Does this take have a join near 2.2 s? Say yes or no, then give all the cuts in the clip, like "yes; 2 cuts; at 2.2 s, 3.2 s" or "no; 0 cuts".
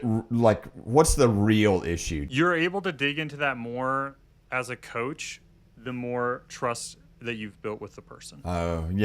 yes; 1 cut; at 2.2 s